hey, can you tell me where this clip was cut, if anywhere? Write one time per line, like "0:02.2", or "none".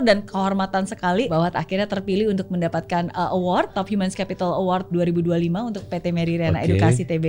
0:01.3
0:03.8
0:04.9